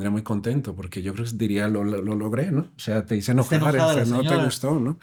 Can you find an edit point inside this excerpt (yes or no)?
no